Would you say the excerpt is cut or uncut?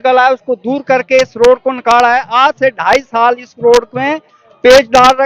uncut